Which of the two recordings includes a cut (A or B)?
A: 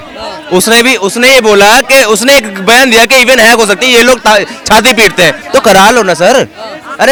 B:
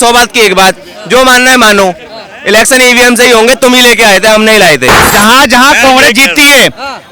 B